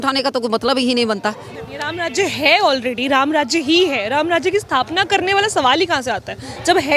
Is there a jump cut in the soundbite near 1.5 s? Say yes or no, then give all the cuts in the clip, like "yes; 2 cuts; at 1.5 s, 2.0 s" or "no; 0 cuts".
yes; 1 cut; at 1.5 s